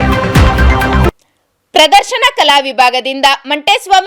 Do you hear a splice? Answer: yes; 1 cut; at 1.1 s

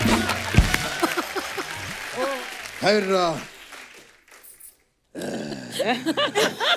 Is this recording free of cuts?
no; 1 cut; at 2.4 s

